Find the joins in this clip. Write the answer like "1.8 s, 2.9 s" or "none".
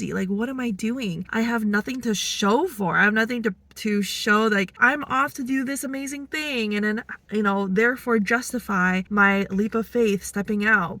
none